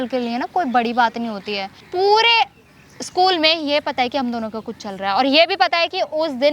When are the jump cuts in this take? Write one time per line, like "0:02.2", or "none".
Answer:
0:01.8